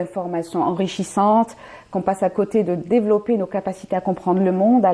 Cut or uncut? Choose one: uncut